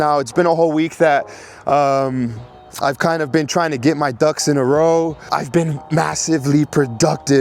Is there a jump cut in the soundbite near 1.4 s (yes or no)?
no